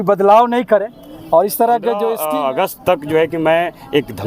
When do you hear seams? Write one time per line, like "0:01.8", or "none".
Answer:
0:02.2